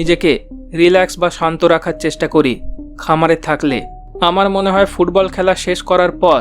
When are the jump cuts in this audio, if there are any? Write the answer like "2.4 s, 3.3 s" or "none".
3.9 s